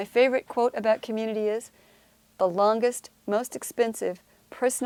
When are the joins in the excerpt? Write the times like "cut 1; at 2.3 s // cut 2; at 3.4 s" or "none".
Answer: none